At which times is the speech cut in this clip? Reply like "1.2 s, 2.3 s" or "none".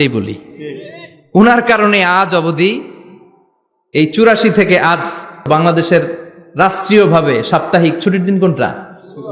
5.5 s